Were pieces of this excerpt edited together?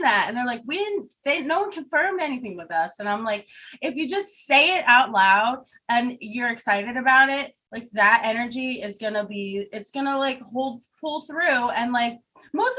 no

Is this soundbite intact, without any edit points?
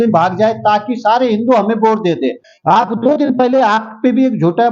no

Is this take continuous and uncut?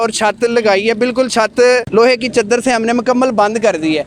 yes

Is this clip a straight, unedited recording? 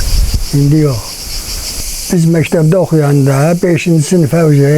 yes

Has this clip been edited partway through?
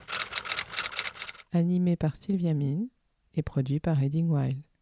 no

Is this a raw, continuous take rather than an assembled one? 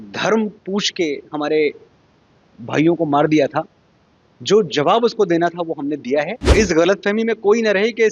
no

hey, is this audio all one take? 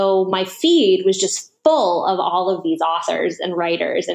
yes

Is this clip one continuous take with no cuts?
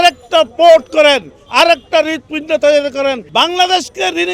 no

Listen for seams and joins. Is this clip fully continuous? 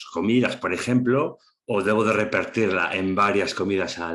yes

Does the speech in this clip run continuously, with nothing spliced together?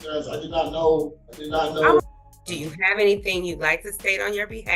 no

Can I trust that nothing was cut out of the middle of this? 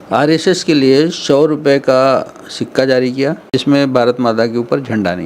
no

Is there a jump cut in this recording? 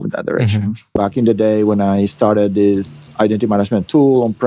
yes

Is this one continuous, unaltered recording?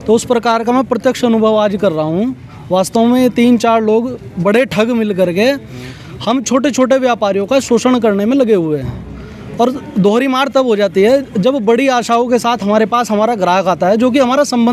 yes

